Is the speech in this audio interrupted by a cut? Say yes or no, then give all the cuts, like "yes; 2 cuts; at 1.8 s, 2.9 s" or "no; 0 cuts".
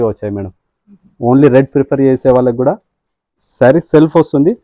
no; 0 cuts